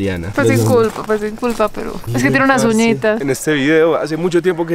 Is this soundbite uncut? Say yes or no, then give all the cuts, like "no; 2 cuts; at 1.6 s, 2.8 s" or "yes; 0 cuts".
no; 1 cut; at 3.2 s